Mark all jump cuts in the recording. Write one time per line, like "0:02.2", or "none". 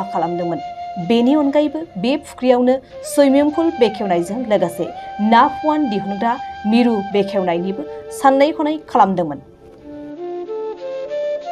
0:09.5